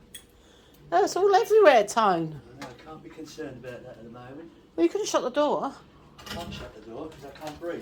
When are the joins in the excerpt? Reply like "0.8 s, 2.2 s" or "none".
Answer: none